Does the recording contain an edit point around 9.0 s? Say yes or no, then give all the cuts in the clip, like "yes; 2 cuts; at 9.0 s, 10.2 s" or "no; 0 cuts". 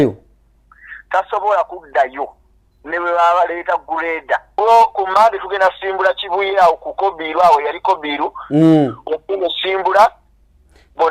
no; 1 cut; at 4.5 s